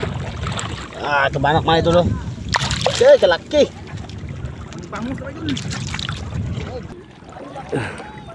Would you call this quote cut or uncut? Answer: cut